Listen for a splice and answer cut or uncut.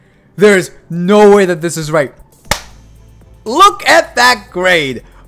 cut